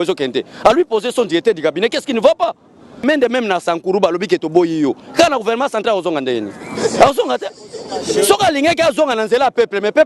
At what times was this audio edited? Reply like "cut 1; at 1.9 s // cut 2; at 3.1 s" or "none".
cut 1; at 3.0 s